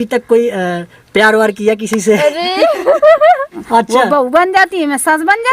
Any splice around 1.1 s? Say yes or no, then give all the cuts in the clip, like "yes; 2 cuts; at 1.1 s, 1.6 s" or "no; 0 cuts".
no; 1 cut; at 3.5 s